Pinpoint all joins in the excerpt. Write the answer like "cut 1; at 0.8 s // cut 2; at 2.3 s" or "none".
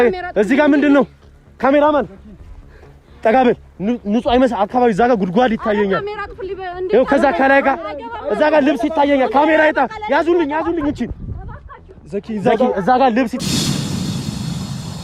none